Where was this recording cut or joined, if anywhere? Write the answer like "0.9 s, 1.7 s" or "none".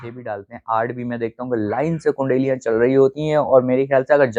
none